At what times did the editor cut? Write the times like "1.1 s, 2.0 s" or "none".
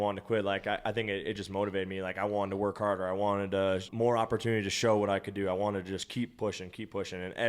3.9 s, 6.1 s